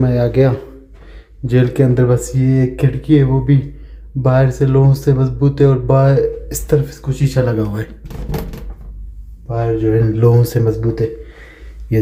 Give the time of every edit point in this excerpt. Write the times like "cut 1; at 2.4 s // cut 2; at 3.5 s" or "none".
none